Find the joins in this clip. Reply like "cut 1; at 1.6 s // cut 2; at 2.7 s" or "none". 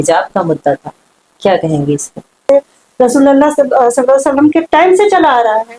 cut 1; at 2.5 s